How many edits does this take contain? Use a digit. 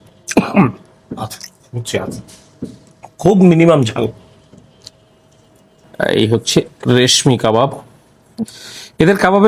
1